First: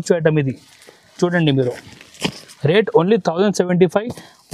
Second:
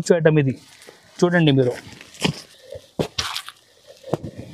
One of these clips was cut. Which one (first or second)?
second